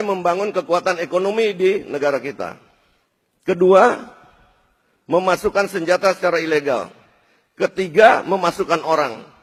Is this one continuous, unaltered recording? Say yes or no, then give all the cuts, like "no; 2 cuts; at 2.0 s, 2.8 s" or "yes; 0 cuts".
yes; 0 cuts